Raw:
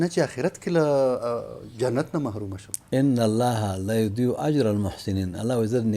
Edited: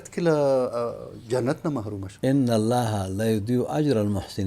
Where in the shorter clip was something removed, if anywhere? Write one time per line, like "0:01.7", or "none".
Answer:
0:02.0